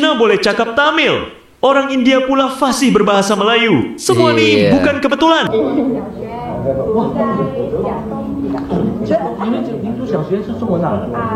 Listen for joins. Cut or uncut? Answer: cut